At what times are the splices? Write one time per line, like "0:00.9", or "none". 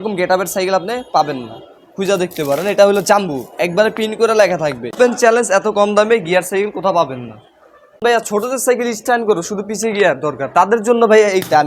0:04.9
0:08.0